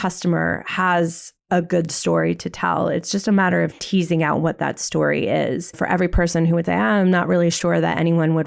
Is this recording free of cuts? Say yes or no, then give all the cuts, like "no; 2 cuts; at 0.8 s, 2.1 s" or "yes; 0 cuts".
no; 1 cut; at 5.8 s